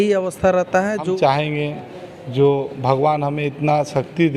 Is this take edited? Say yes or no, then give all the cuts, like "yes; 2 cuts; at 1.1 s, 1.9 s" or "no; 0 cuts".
yes; 1 cut; at 1.1 s